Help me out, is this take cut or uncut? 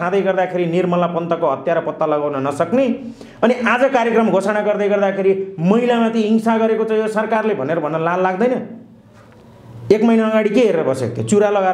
uncut